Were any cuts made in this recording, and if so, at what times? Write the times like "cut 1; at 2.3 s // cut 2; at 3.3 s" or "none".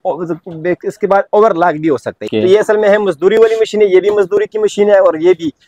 cut 1; at 2.2 s